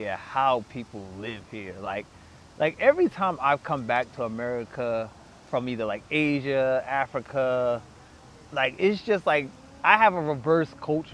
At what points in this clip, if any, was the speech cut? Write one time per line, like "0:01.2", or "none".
none

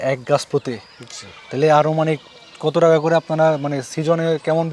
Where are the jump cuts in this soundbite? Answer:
none

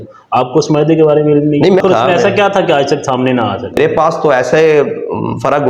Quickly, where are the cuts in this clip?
0:01.8
0:03.8

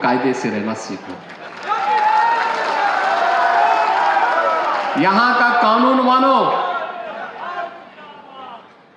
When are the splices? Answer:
none

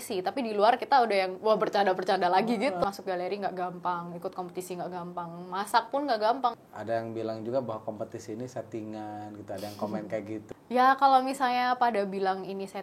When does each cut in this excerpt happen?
0:02.8
0:06.6
0:10.4

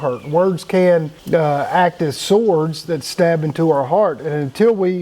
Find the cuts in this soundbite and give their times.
0:01.1

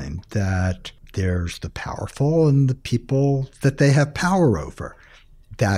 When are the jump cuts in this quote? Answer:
0:00.9

